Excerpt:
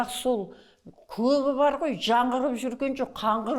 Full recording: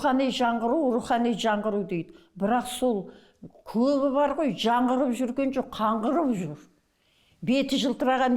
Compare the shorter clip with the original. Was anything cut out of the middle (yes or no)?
no